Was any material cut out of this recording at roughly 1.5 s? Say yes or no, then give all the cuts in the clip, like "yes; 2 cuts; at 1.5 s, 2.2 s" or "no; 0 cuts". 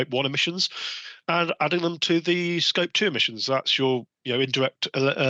no; 0 cuts